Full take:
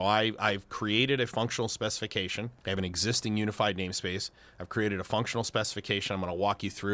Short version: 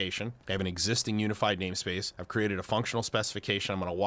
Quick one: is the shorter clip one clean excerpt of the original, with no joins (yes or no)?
no